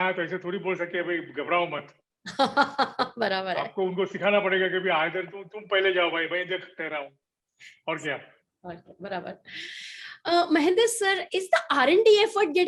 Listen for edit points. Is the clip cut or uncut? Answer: uncut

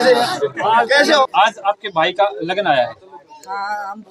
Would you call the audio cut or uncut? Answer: cut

